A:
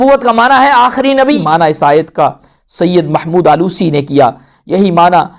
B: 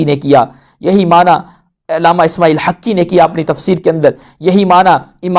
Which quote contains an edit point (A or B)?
A